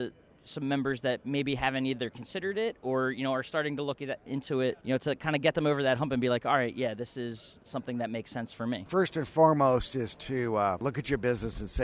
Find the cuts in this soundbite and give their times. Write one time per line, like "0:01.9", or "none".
0:04.8
0:08.9
0:10.8